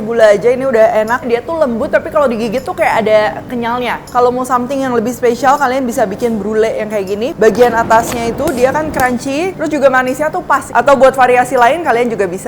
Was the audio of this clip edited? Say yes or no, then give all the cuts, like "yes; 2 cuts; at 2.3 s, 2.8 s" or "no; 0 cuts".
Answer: yes; 4 cuts; at 1.2 s, 4.0 s, 9.6 s, 10.6 s